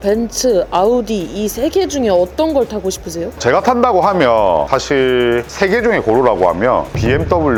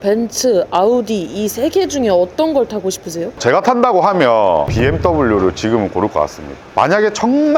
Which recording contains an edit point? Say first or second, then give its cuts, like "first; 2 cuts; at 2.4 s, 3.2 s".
second; 2 cuts; at 4.7 s, 6.7 s